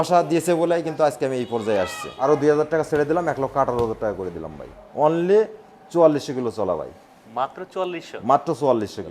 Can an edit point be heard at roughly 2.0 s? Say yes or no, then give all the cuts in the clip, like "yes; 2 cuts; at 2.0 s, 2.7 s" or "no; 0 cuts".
yes; 2 cuts; at 2.0 s, 4.8 s